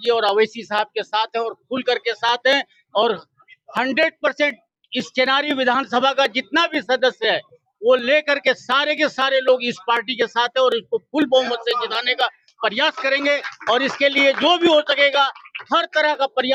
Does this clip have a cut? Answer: no; 0 cuts

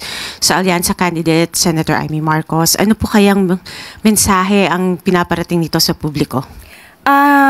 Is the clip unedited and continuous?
no; 1 cut; at 1.6 s

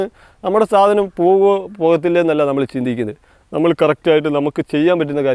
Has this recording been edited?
no; 0 cuts

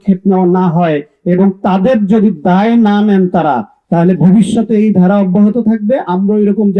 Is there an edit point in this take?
no; 0 cuts

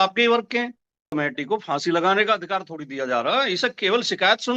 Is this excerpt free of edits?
no; 1 cut; at 1.1 s

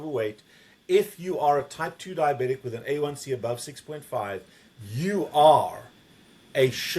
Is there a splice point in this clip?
no; 0 cuts

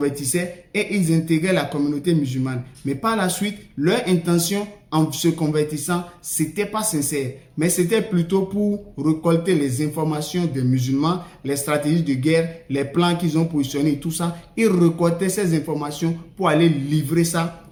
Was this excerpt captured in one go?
yes; 0 cuts

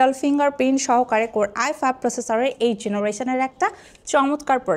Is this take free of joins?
yes; 0 cuts

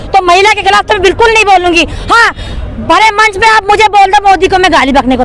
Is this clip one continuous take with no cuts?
yes; 0 cuts

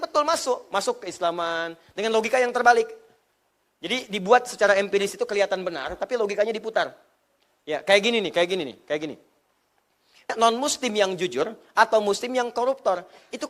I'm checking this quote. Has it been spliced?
yes; 1 cut; at 10.3 s

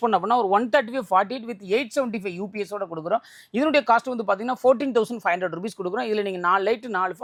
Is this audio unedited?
yes; 0 cuts

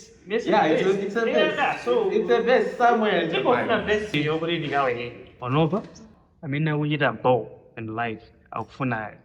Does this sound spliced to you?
yes; 1 cut; at 5.3 s

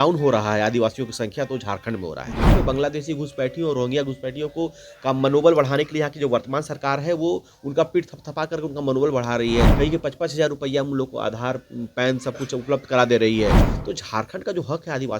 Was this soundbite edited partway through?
yes; 3 cuts; at 2.5 s, 9.7 s, 13.6 s

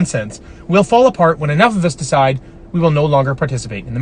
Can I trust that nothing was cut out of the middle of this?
yes; 0 cuts

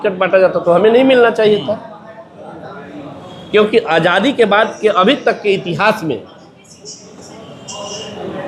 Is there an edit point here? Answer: no; 0 cuts

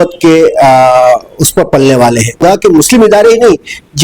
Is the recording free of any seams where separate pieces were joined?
no; 1 cut; at 2.4 s

